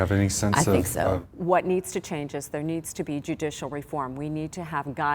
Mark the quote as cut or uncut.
cut